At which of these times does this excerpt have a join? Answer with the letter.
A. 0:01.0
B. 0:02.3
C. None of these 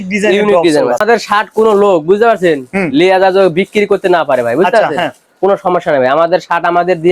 A